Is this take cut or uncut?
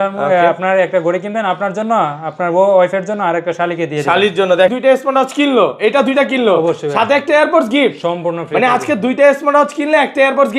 cut